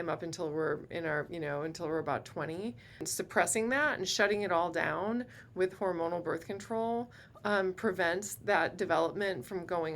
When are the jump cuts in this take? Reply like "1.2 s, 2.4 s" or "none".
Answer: 3.1 s

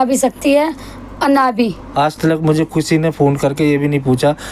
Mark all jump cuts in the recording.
1.8 s

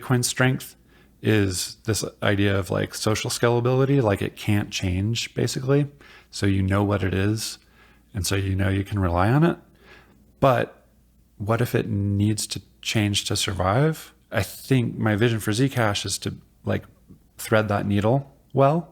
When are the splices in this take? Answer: 14.1 s

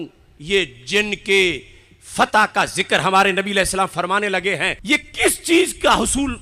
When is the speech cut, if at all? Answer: 4.8 s

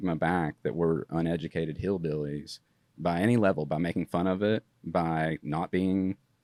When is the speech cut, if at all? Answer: none

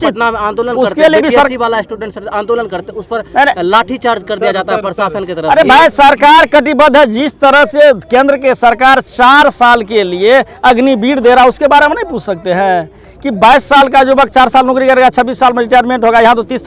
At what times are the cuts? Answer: none

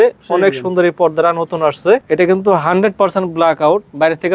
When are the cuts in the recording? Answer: 2.0 s

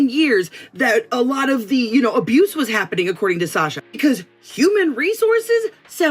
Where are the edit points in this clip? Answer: 1.2 s

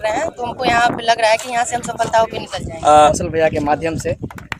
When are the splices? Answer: 3.1 s

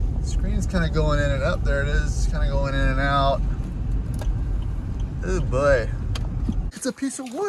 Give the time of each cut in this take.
6.4 s

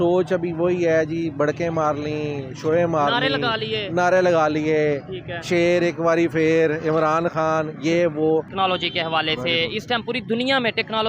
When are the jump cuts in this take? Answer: 8.5 s

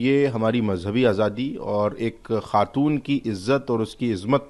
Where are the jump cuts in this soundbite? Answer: none

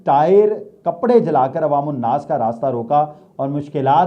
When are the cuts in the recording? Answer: none

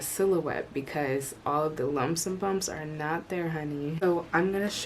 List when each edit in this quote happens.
3.9 s

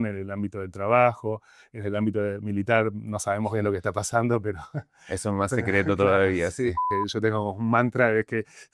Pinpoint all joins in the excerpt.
6.9 s

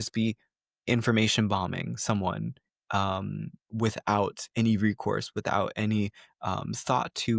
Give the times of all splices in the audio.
none

